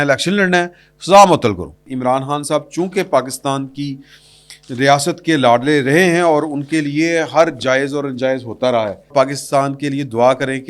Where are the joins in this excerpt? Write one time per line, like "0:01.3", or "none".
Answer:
0:01.9
0:09.1